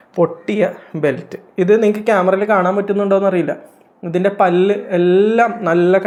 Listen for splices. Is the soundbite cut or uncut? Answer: uncut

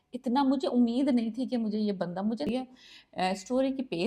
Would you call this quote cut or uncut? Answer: cut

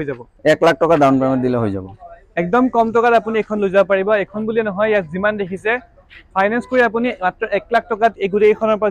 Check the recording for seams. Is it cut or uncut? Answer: uncut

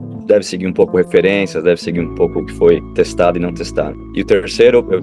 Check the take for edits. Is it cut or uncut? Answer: cut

